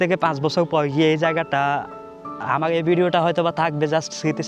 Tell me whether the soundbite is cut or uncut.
uncut